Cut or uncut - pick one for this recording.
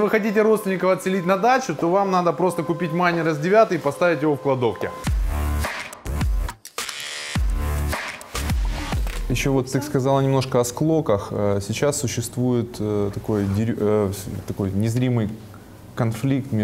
uncut